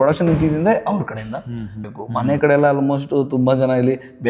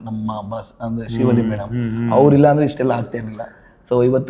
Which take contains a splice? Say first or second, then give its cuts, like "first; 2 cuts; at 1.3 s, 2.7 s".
first; 1 cut; at 1.8 s